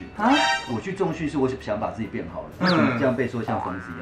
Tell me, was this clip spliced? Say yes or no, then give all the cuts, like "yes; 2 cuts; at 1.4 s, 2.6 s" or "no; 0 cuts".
no; 0 cuts